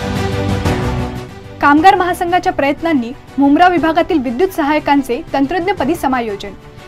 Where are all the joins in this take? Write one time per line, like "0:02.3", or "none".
0:01.3

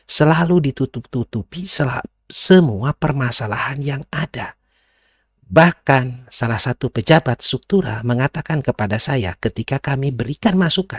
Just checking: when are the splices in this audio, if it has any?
none

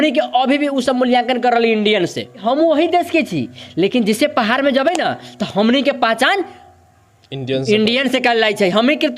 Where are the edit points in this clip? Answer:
0:02.4

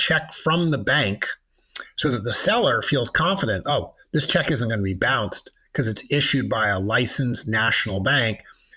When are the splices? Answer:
none

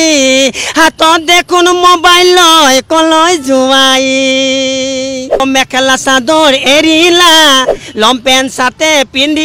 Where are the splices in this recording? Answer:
0:05.4

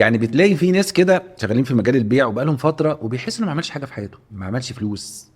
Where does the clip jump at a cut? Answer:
0:01.3
0:04.2

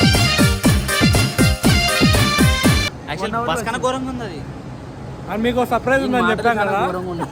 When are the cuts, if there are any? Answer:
none

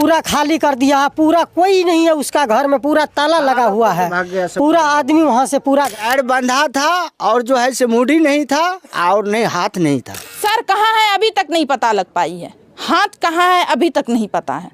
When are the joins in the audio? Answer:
0:05.9
0:10.2

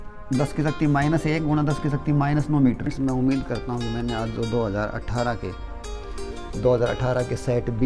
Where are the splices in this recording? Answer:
0:02.9

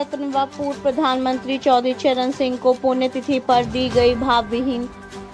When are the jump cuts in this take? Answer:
none

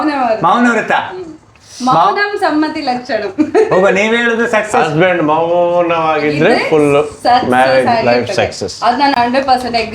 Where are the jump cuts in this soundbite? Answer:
none

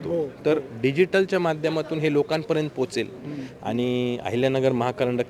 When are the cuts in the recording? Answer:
none

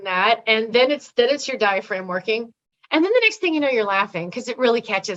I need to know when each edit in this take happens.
none

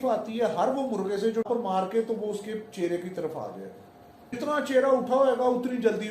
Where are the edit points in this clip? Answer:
0:01.5
0:04.4

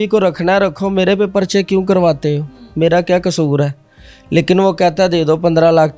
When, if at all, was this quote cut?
none

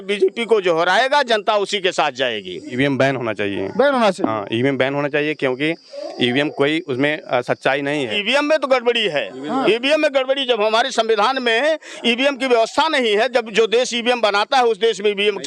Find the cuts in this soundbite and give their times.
0:02.7
0:08.2

